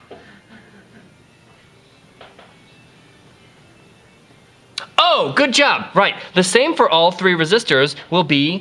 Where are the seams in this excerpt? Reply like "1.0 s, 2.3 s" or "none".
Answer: 7.5 s